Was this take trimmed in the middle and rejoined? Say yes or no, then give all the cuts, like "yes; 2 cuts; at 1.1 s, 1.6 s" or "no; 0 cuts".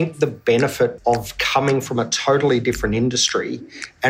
yes; 1 cut; at 1.0 s